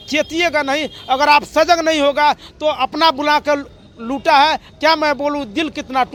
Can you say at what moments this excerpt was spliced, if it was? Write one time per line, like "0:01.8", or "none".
none